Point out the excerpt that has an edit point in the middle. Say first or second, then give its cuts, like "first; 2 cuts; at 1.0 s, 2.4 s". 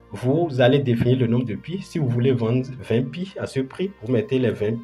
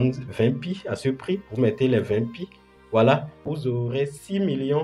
second; 1 cut; at 3.3 s